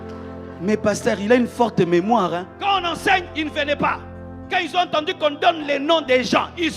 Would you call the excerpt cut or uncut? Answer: cut